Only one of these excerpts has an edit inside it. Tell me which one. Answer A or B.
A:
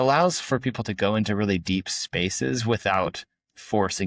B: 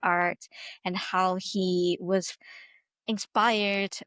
B